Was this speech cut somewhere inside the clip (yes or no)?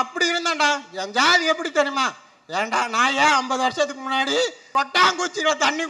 no